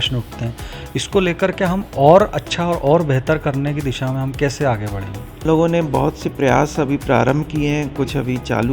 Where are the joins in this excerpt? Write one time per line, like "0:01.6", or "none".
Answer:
0:05.4